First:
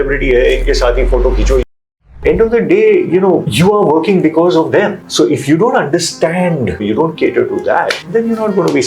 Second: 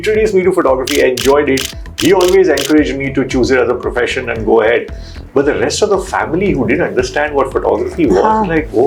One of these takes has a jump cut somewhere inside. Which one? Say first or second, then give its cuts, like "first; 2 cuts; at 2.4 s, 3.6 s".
first; 5 cuts; at 1.9 s, 3.5 s, 5.0 s, 6.8 s, 8.0 s